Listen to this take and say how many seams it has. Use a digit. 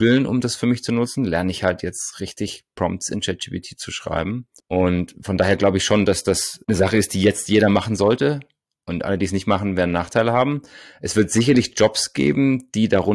0